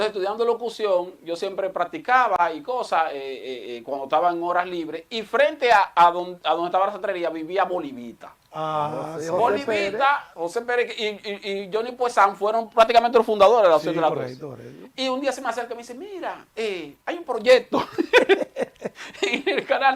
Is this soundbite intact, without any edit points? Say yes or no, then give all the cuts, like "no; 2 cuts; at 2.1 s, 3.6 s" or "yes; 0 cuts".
yes; 0 cuts